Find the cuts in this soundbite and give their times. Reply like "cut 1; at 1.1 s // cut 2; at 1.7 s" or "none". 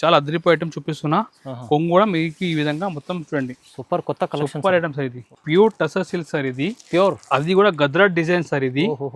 cut 1; at 5.3 s